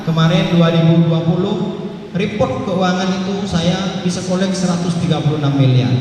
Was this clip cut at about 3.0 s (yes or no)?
no